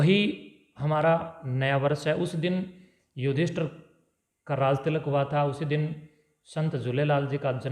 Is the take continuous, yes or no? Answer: yes